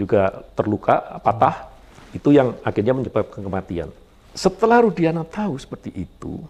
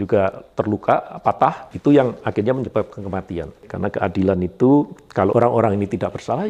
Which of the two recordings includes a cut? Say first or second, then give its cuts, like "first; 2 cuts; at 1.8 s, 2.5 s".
second; 3 cuts; at 1.7 s, 3.7 s, 5.3 s